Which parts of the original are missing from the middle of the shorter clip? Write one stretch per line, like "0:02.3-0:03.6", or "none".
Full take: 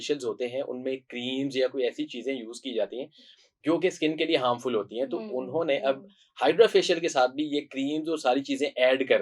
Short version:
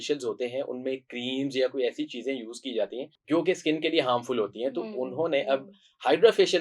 0:03.1-0:03.5